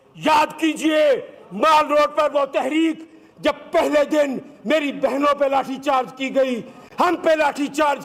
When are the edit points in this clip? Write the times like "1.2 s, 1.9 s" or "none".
none